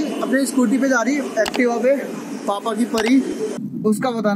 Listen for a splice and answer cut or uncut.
cut